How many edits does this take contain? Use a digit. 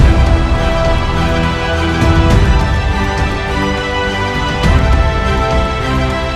0